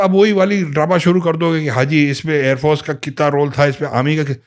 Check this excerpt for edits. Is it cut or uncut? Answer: uncut